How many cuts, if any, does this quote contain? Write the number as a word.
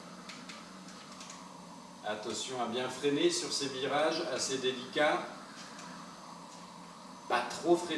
one